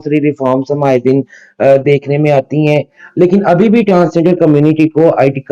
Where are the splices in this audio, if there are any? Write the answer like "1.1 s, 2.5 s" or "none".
none